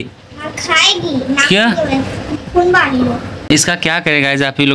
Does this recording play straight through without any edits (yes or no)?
no